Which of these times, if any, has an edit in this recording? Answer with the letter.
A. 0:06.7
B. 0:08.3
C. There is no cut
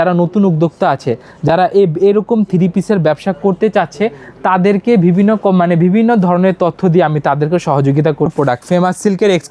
B